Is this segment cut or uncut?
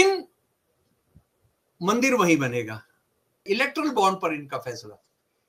cut